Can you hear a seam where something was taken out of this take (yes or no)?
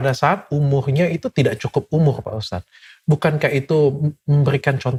no